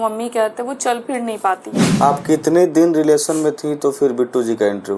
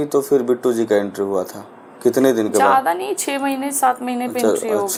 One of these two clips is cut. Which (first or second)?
first